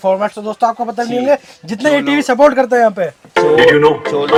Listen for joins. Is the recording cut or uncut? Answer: uncut